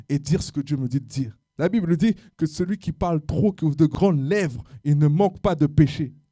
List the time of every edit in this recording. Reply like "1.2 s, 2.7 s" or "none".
1.4 s